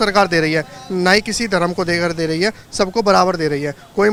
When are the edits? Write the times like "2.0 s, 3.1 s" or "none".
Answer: none